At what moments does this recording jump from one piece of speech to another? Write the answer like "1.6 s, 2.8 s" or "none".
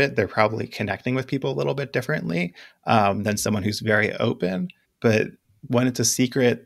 4.8 s, 5.5 s